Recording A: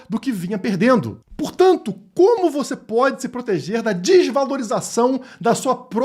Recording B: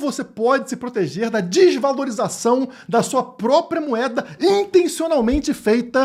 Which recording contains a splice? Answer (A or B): A